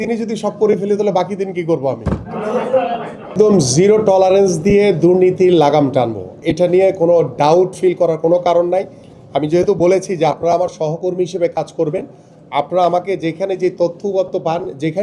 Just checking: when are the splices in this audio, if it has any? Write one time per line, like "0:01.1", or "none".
none

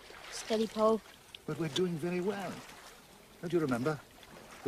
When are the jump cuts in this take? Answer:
0:01.9

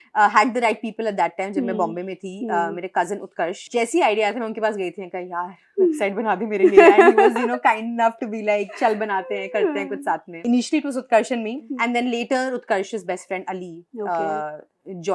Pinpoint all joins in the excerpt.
0:03.6
0:10.4
0:11.7

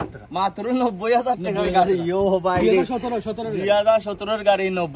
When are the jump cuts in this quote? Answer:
none

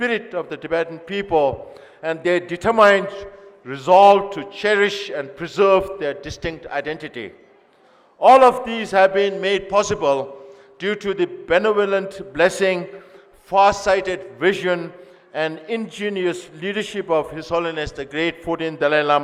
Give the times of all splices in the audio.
none

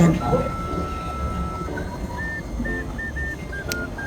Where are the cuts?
0:01.4

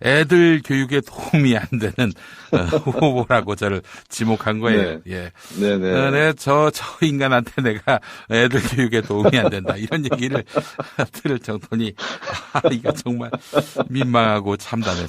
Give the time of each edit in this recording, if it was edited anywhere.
0:05.8

